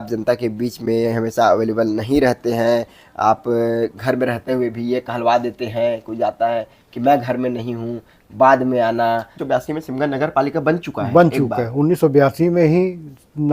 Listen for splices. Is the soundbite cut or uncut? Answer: cut